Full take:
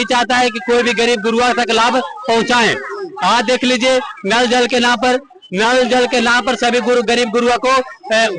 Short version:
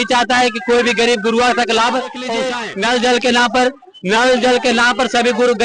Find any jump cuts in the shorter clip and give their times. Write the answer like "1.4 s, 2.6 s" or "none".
2.4 s